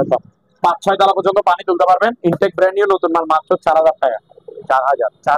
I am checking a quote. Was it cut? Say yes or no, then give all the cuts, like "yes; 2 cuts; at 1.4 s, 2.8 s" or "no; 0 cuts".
no; 0 cuts